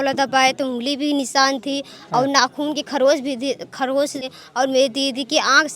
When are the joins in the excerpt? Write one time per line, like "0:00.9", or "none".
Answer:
0:04.3